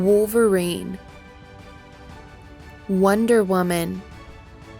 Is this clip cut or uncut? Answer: cut